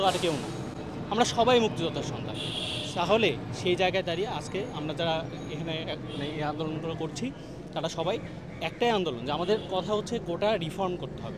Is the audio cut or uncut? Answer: uncut